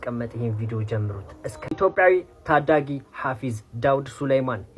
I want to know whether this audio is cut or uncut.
cut